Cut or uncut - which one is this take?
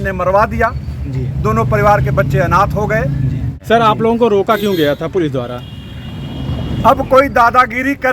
cut